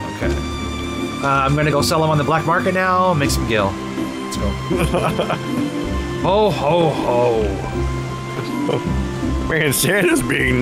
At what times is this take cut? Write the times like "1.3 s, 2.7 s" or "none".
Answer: none

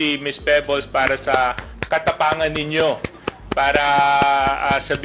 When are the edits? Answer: none

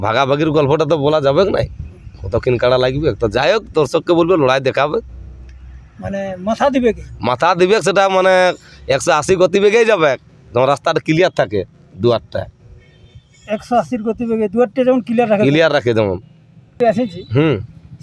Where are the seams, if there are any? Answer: 16.8 s

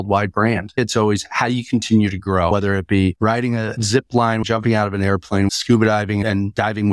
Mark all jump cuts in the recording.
0.8 s, 2.5 s, 4.4 s, 5.5 s

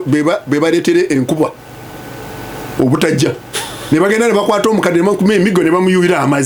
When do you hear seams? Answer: none

